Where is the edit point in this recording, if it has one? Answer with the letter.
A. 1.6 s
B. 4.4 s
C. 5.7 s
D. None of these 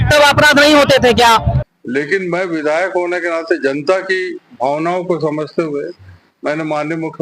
A